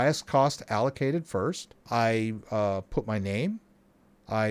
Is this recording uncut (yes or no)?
no